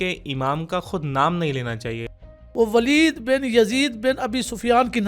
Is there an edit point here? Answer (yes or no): yes